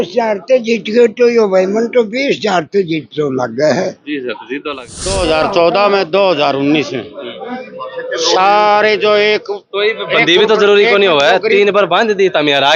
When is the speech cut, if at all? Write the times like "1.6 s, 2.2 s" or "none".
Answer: 4.7 s